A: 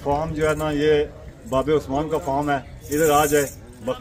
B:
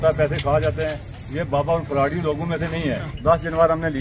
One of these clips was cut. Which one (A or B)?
B